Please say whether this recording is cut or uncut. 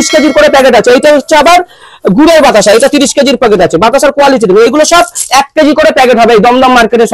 uncut